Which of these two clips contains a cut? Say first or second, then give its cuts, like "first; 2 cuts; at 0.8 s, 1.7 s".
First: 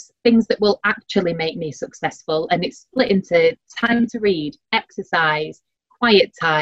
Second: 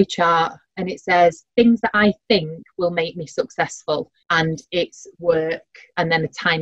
second; 1 cut; at 4.2 s